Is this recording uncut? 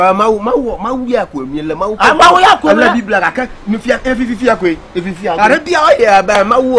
yes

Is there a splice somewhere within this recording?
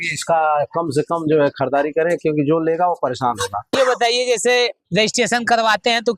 yes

